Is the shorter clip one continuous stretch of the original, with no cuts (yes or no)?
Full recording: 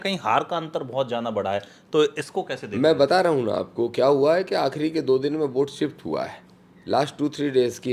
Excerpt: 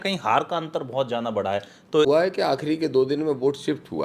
no